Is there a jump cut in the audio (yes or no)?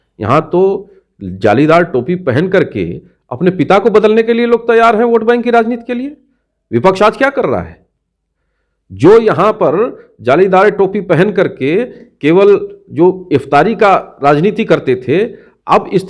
no